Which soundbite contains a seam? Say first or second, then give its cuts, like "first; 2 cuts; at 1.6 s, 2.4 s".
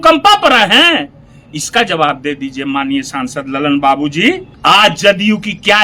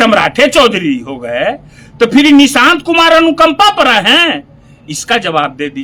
first; 1 cut; at 4.5 s